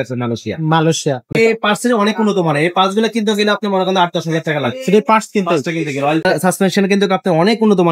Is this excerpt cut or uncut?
cut